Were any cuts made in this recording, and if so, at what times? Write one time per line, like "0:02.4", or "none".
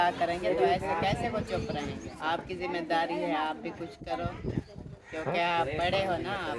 0:02.1